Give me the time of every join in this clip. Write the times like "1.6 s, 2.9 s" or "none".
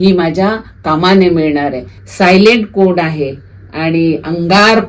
2.0 s